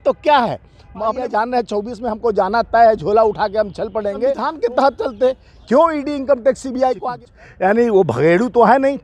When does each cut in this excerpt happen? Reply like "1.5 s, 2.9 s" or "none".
1.2 s, 4.5 s, 7.0 s